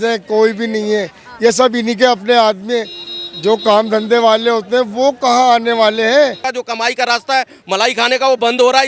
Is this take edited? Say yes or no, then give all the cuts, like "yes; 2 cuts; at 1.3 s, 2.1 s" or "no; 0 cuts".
yes; 1 cut; at 6.4 s